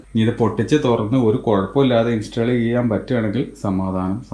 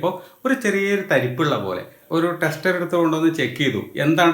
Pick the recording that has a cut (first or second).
second